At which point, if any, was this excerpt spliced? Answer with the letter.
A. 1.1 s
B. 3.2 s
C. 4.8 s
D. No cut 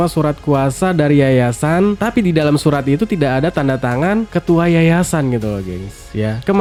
D